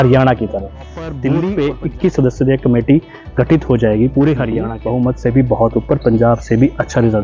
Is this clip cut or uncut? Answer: cut